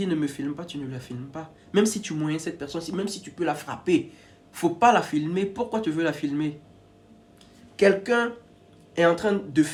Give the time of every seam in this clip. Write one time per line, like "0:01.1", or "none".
none